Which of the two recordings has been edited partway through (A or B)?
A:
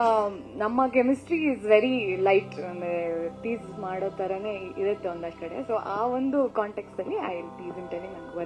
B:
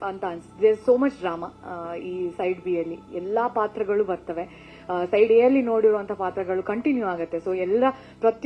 A